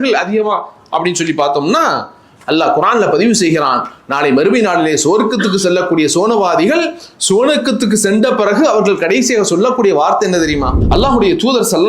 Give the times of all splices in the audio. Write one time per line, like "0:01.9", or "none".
0:02.3
0:10.8